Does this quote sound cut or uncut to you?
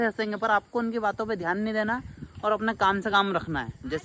uncut